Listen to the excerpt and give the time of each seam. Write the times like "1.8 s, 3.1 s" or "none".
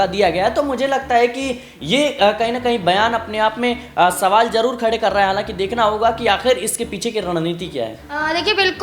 none